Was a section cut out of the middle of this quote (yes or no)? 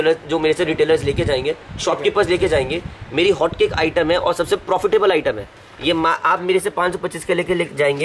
no